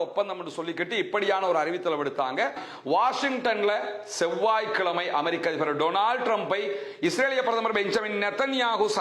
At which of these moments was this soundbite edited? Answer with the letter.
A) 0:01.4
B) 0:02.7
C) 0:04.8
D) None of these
B